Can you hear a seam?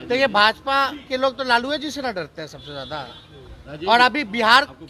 no; 0 cuts

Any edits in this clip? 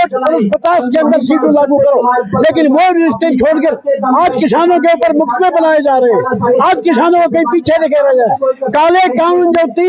no; 0 cuts

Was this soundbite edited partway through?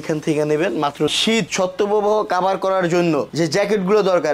yes; 1 cut; at 1.1 s

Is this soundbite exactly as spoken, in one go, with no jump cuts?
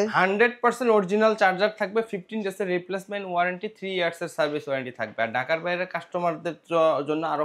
yes; 0 cuts

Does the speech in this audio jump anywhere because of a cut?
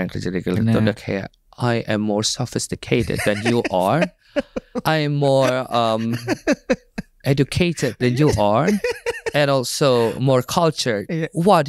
no; 0 cuts

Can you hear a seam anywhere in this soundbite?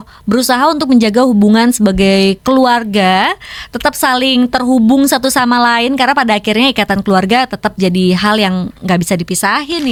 no; 0 cuts

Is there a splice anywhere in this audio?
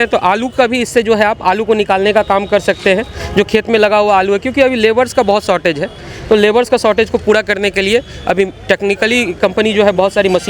no; 0 cuts

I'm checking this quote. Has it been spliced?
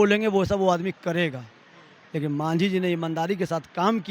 no; 0 cuts

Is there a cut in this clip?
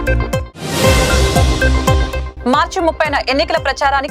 yes; 1 cut; at 2.2 s

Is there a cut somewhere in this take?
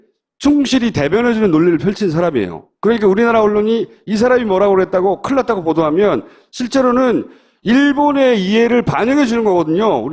no; 0 cuts

